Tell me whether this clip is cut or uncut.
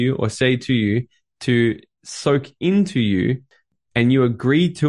uncut